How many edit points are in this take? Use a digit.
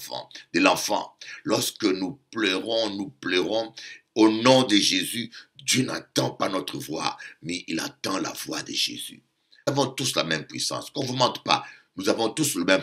1